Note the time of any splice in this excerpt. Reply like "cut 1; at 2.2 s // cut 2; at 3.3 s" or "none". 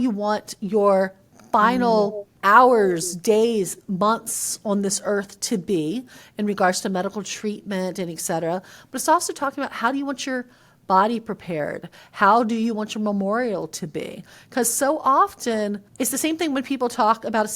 cut 1; at 2.3 s // cut 2; at 15.8 s